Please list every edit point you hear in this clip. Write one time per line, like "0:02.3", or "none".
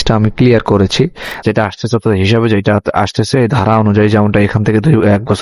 0:01.3